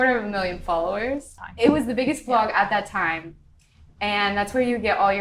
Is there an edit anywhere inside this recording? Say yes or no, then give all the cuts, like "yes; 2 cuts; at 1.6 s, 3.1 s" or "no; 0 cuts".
yes; 1 cut; at 1.3 s